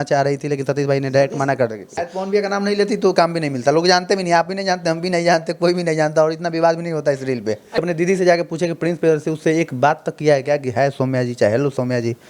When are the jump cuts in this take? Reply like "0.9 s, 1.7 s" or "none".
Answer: 1.9 s, 7.8 s